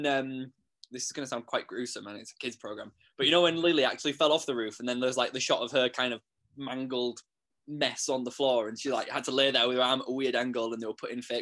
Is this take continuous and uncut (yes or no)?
yes